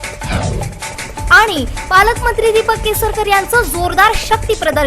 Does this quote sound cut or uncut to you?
cut